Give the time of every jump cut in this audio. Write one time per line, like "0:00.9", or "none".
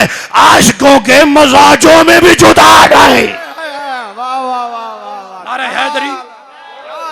none